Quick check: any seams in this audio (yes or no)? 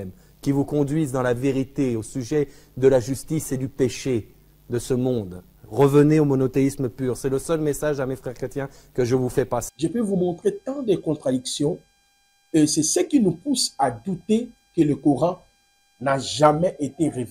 yes